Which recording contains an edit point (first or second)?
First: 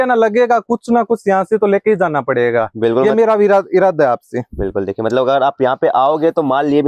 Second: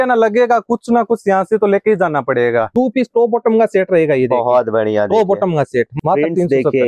second